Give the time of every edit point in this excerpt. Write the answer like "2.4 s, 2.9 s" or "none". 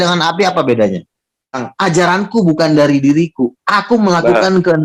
1.7 s